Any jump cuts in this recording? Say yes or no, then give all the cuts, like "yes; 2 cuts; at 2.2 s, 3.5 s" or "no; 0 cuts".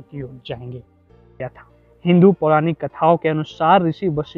yes; 1 cut; at 1.3 s